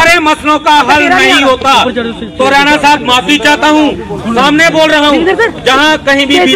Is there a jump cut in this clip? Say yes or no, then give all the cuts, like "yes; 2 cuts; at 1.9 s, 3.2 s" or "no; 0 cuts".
no; 0 cuts